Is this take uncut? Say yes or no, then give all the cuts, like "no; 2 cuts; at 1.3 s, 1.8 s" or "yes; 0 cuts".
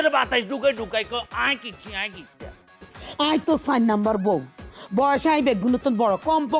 no; 1 cut; at 2.9 s